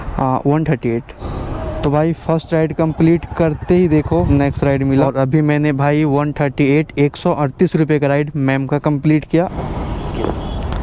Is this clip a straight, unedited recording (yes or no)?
no